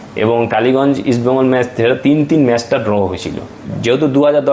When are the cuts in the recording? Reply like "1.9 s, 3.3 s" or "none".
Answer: 3.6 s